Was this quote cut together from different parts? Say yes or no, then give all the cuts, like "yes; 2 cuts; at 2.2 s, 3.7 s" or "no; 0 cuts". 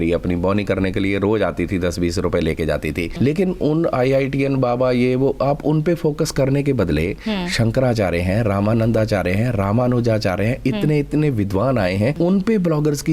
yes; 2 cuts; at 3.1 s, 12.1 s